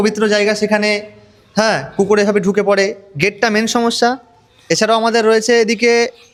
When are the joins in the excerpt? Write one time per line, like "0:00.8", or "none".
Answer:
none